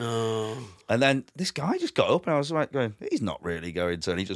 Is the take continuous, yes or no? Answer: yes